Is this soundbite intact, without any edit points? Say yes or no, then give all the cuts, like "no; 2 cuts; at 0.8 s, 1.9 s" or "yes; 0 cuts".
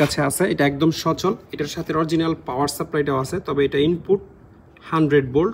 yes; 0 cuts